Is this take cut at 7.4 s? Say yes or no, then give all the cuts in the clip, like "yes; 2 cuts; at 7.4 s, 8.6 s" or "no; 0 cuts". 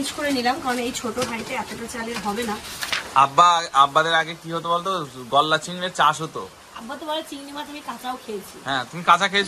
no; 1 cut; at 2.9 s